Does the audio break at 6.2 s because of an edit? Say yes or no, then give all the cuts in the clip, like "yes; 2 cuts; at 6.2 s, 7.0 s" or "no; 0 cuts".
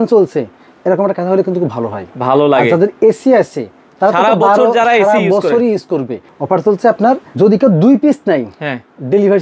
yes; 2 cuts; at 6.2 s, 7.3 s